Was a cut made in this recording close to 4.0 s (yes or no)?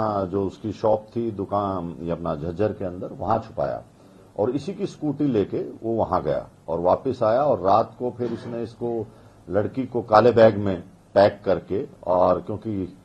no